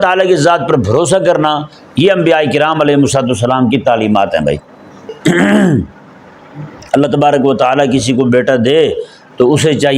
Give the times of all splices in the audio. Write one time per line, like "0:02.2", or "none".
0:05.1

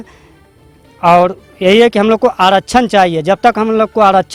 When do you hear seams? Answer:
none

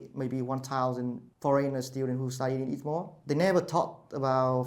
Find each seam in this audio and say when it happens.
0:01.3
0:03.1

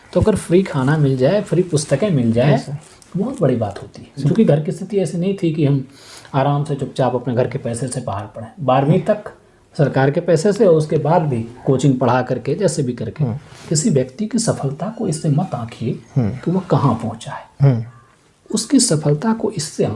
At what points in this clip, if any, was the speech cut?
0:04.2
0:11.5
0:13.7

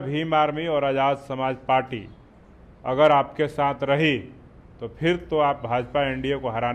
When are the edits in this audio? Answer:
none

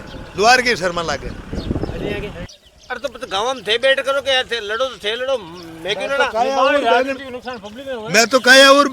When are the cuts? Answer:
0:02.5

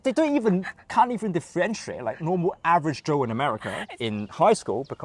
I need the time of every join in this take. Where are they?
0:03.7

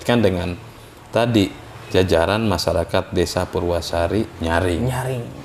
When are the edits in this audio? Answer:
none

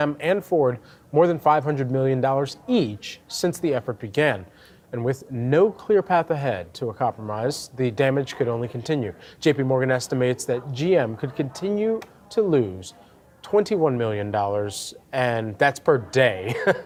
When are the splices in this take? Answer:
none

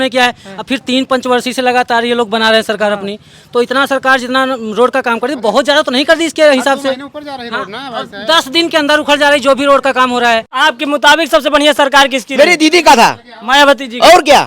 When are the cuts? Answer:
0:10.5

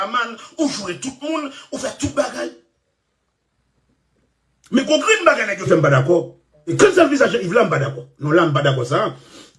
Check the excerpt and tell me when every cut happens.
0:06.7

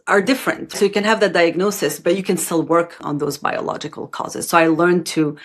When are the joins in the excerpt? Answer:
0:00.9

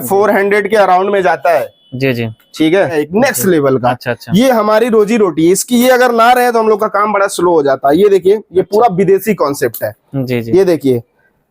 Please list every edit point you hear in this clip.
0:02.9

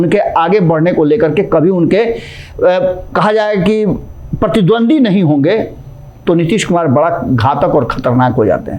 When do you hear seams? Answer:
none

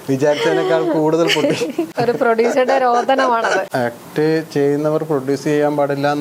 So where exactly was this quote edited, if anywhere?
0:01.9
0:03.7

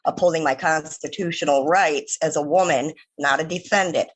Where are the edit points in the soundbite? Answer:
none

